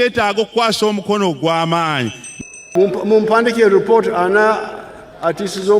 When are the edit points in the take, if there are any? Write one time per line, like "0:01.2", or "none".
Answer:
0:02.7

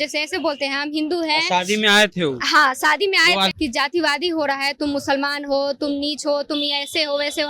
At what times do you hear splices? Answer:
0:03.5

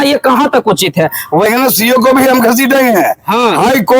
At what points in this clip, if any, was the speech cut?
0:01.5

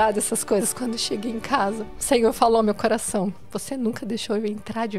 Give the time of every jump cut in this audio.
0:01.9
0:03.5

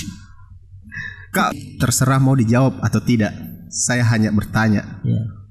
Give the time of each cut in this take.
0:01.5

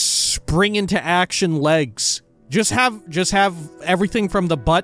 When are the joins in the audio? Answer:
0:02.3

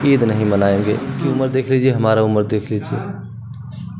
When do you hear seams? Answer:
0:01.3

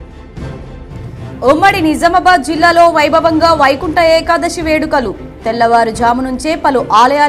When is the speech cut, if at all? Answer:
none

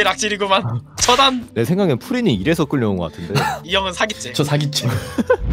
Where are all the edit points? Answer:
0:01.5
0:03.6

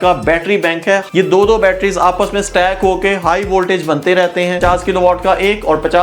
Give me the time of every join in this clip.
0:01.1
0:04.6

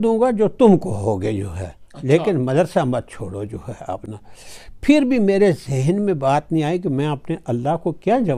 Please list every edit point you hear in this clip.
none

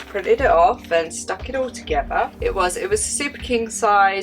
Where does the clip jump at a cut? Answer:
0:02.4

